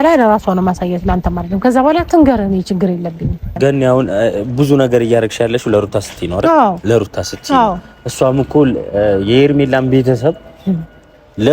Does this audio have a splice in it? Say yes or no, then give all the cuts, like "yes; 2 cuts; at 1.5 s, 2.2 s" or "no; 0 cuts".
yes; 1 cut; at 3.5 s